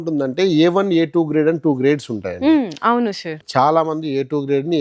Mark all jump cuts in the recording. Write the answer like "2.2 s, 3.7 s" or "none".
3.3 s